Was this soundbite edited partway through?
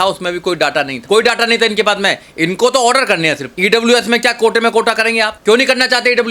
yes; 3 cuts; at 1.0 s, 3.5 s, 5.3 s

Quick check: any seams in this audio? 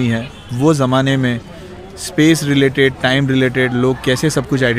no; 0 cuts

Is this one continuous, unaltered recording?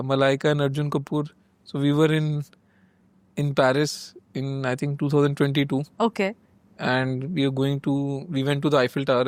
yes; 0 cuts

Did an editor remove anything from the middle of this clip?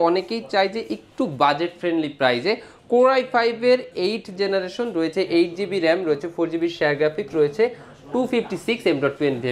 no; 0 cuts

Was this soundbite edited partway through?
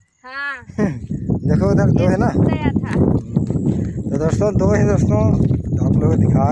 no; 0 cuts

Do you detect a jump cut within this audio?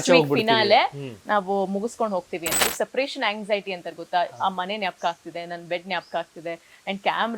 yes; 1 cut; at 2.6 s

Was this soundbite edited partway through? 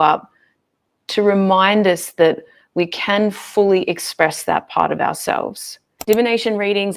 yes; 1 cut; at 5.9 s

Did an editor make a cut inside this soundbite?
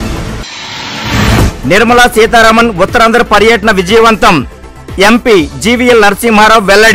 yes; 1 cut; at 1.4 s

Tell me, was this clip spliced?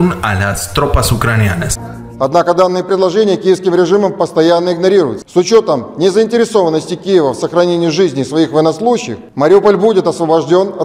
no; 0 cuts

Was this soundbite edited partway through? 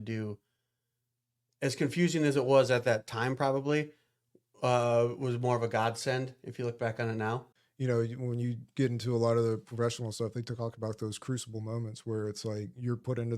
yes; 1 cut; at 7.5 s

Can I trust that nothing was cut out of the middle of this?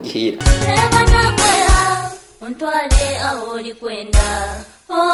yes; 0 cuts

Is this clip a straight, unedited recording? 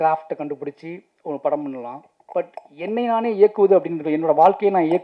yes; 0 cuts

